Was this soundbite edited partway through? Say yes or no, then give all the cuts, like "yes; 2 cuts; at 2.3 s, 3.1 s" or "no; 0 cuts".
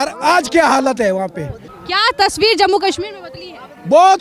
yes; 1 cut; at 1.7 s